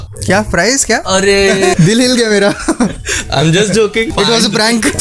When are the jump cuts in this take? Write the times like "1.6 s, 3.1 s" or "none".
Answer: 1.7 s, 4.1 s